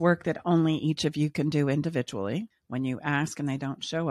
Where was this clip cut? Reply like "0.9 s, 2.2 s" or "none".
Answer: 2.6 s